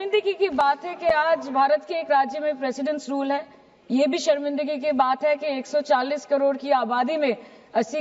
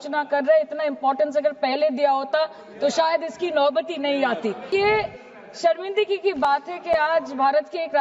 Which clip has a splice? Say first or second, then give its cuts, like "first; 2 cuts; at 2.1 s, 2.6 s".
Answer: second; 1 cut; at 4.7 s